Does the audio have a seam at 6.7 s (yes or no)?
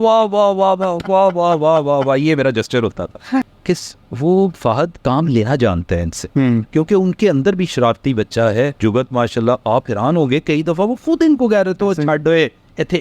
yes